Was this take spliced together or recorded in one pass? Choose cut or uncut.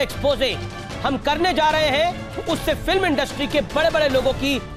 uncut